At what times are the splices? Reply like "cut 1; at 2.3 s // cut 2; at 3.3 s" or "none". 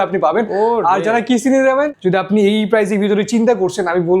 cut 1; at 1.9 s